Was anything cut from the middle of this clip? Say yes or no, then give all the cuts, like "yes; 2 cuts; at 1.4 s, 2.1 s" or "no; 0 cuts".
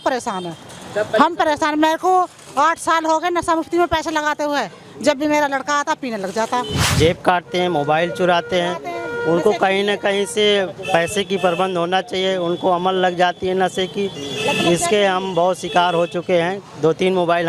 yes; 1 cut; at 6.9 s